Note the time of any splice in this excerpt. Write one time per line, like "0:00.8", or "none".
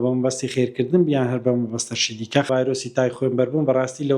0:02.5